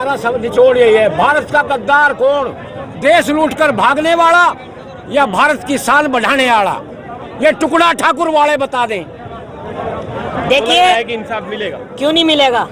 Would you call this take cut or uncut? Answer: uncut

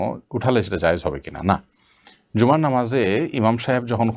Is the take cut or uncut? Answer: uncut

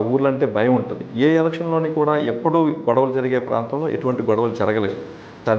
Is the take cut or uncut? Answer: cut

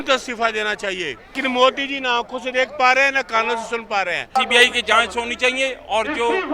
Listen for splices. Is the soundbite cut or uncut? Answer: cut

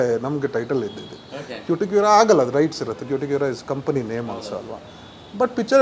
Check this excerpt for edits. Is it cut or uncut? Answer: uncut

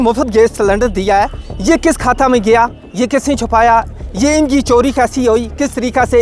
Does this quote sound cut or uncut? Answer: uncut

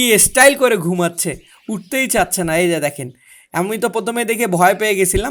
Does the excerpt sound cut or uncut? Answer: uncut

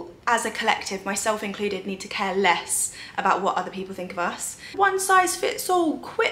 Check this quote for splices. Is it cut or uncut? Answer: cut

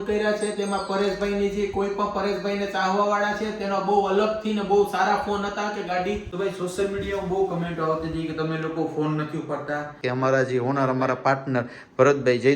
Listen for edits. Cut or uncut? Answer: cut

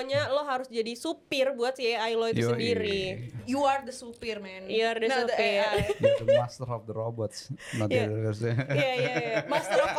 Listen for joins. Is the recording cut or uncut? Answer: uncut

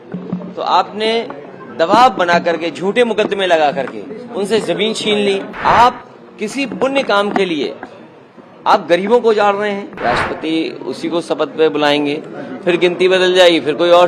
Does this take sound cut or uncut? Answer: cut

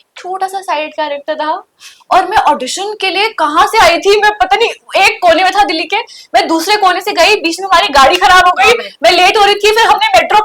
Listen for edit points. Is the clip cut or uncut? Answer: uncut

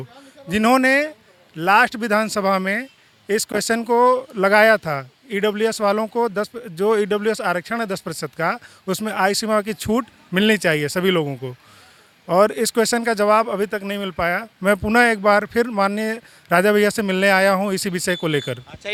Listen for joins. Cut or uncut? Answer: uncut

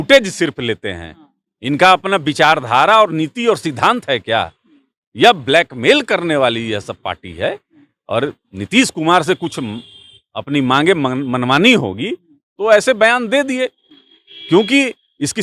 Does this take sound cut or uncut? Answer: uncut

